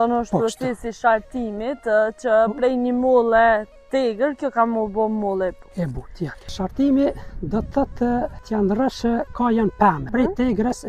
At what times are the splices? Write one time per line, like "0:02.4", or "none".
0:06.5
0:08.4
0:10.1